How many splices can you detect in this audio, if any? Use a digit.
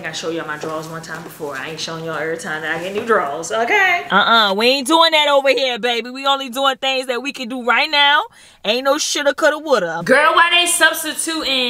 2